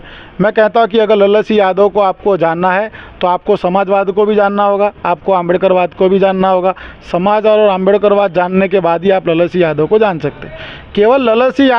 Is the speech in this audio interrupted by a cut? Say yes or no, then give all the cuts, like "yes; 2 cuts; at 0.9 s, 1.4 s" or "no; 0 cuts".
no; 0 cuts